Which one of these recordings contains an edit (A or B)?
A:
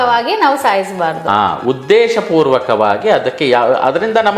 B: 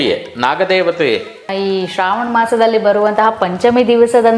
B